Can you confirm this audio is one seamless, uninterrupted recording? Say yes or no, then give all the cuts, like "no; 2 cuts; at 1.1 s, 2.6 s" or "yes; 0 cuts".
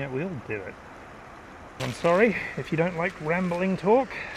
no; 1 cut; at 1.8 s